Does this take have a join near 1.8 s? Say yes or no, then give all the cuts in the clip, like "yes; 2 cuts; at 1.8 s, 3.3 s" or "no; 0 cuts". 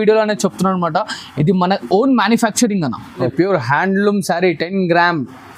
no; 1 cut; at 3.3 s